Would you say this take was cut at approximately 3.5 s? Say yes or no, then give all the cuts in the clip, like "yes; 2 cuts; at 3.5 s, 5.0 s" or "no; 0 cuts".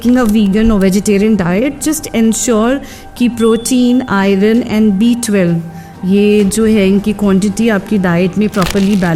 no; 0 cuts